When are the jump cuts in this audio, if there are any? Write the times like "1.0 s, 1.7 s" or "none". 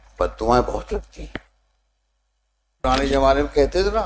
2.8 s